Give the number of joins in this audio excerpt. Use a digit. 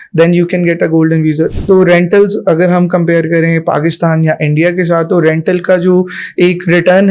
1